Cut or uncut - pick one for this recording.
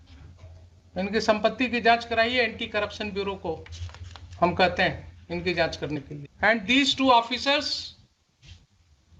cut